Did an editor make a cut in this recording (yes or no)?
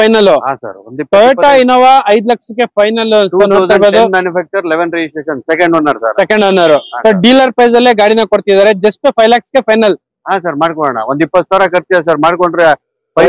no